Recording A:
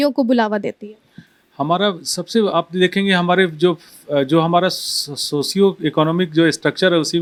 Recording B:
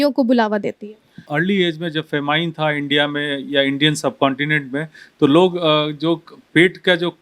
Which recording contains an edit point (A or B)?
B